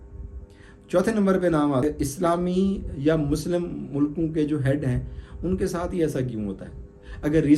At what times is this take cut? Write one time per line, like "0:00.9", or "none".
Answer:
0:01.8